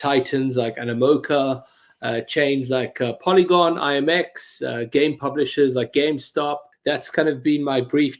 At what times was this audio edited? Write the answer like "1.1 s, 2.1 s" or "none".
6.7 s